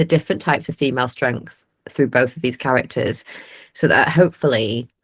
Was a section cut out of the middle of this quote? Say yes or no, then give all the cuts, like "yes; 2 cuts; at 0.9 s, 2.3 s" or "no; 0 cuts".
no; 0 cuts